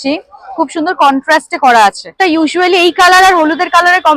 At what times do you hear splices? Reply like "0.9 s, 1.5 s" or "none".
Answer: 2.1 s